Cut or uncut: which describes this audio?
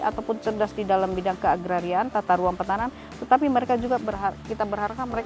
uncut